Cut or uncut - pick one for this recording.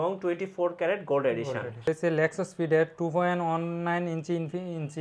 cut